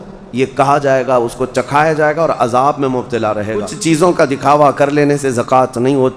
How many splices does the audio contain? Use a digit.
1